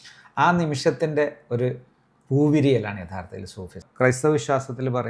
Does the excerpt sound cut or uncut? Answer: cut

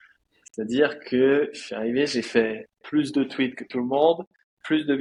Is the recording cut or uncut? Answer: uncut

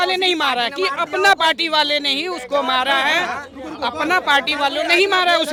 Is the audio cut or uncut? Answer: uncut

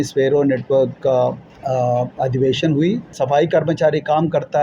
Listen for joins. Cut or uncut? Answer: cut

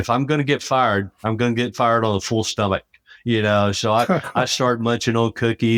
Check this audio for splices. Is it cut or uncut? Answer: uncut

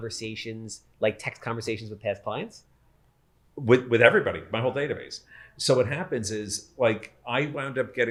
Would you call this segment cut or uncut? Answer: uncut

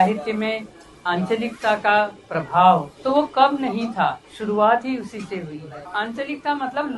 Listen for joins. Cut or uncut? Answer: cut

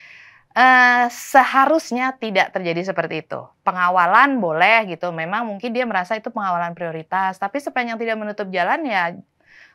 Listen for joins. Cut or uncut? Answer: uncut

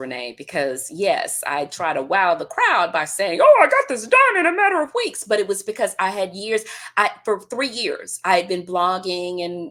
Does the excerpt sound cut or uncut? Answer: uncut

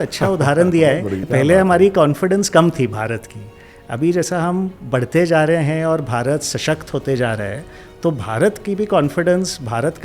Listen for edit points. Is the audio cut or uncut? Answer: cut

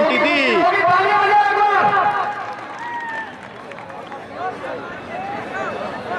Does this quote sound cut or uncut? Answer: uncut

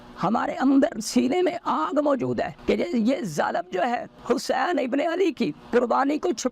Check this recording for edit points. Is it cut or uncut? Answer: cut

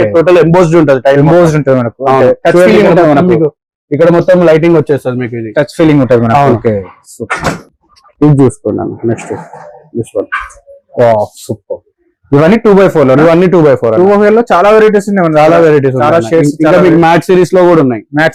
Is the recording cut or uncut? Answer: uncut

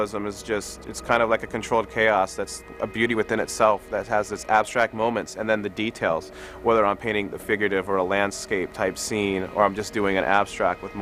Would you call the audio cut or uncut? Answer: uncut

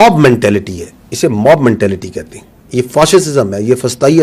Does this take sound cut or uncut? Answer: uncut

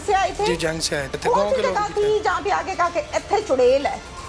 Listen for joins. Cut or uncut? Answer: cut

